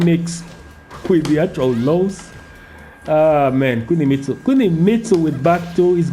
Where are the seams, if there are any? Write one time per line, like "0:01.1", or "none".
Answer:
none